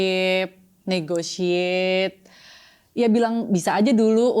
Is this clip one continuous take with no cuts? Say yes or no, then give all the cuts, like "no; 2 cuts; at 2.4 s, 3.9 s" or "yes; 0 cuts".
yes; 0 cuts